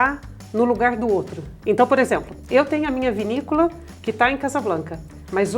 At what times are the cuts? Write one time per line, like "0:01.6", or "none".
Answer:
none